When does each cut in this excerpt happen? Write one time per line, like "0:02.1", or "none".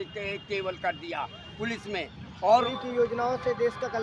0:02.7